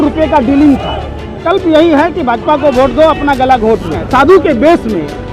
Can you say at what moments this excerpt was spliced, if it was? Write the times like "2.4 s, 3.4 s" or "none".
1.3 s, 4.0 s